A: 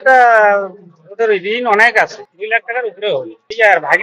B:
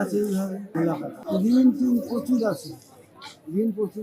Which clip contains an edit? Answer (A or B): B